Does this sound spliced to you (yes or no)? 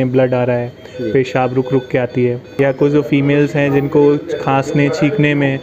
yes